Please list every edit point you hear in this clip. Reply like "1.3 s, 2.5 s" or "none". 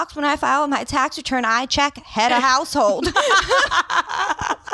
none

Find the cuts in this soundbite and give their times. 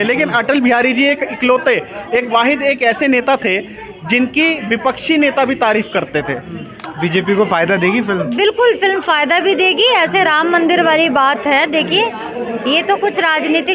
6.7 s

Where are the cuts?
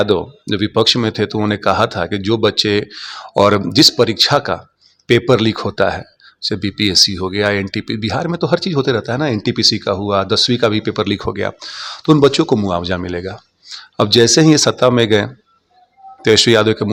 none

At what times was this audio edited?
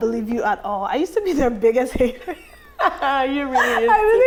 none

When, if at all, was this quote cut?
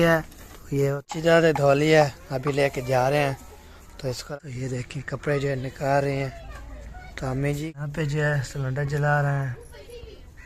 1.0 s, 4.2 s, 7.6 s

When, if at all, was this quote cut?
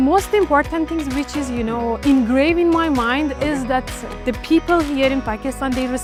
none

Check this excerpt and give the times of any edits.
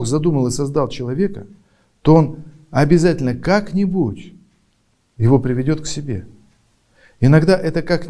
none

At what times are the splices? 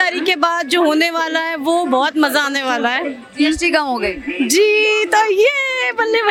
none

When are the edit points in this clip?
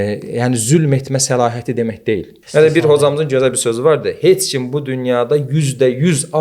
2.4 s

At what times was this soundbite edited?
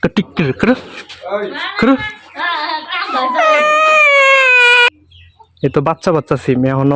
4.9 s

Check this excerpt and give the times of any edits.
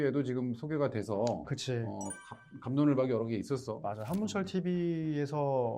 none

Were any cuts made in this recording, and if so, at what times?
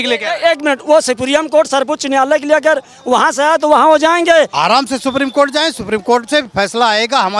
4.5 s

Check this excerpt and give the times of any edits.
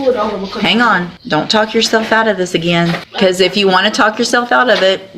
1.1 s, 3.1 s

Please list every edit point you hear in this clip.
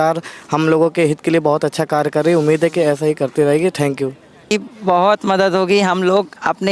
4.5 s

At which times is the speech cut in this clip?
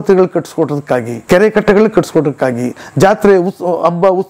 1.1 s

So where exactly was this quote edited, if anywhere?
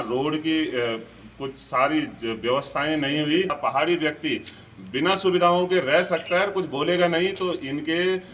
none

